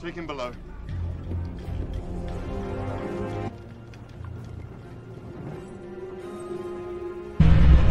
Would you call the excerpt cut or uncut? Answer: uncut